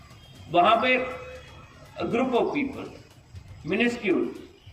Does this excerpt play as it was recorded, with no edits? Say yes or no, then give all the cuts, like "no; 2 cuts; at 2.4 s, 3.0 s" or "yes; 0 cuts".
yes; 0 cuts